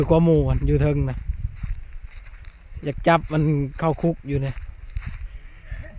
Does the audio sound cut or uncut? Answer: uncut